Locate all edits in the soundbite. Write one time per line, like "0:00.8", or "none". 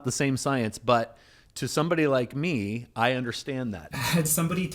0:03.8